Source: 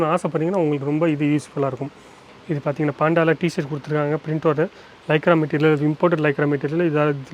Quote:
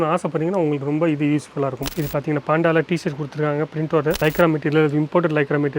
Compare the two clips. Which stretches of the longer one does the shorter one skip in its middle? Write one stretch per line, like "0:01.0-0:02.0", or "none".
0:01.9-0:02.4
0:04.7-0:05.1